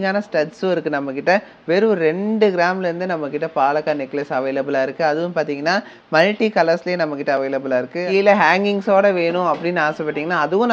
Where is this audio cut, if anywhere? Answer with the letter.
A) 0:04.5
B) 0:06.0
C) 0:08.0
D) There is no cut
C